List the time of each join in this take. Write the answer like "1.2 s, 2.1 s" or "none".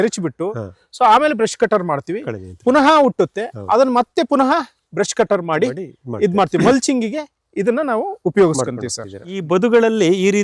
9.3 s